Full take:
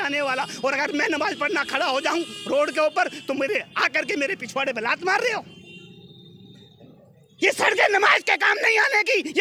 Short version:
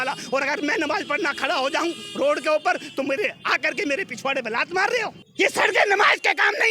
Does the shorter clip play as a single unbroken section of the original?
no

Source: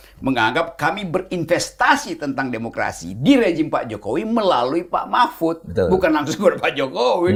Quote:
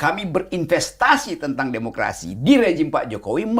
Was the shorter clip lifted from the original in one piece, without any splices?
yes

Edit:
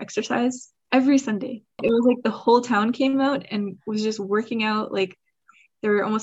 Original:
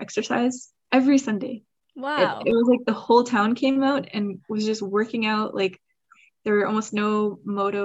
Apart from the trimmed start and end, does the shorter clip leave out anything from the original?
yes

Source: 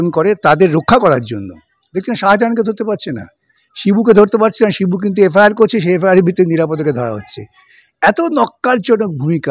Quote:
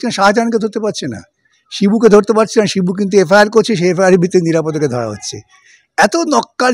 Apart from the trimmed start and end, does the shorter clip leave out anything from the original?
no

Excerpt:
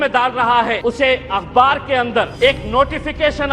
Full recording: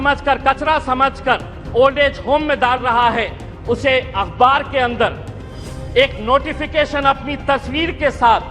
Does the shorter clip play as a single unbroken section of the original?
no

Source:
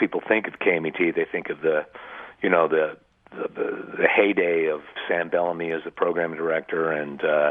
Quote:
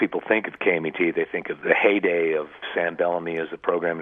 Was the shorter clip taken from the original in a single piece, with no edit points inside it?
no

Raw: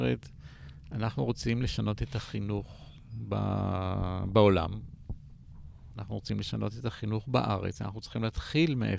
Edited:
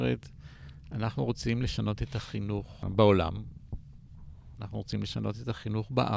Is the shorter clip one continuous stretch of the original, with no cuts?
no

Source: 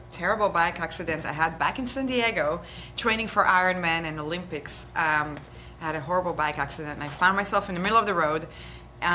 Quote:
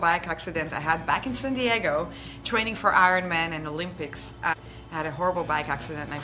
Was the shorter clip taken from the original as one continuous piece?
no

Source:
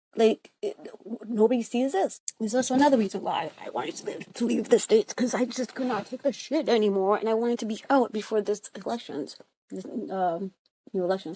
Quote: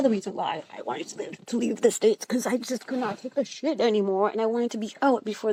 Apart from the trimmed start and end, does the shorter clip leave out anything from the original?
no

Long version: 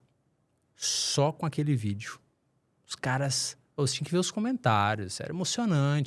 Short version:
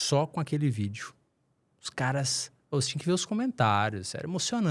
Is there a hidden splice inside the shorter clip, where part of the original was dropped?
no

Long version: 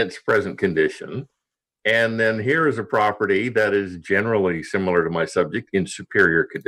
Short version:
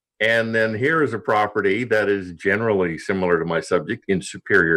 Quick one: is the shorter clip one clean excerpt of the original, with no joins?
yes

